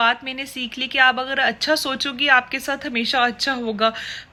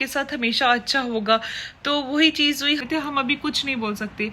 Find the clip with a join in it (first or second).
second